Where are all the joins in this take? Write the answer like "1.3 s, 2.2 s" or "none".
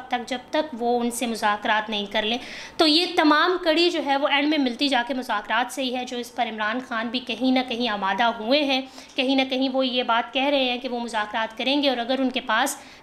none